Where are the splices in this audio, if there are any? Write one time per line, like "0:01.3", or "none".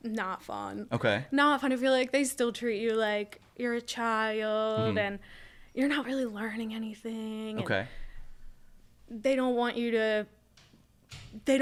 none